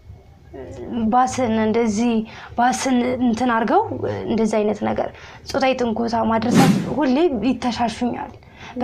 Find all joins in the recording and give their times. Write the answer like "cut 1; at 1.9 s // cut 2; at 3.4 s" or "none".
cut 1; at 6.7 s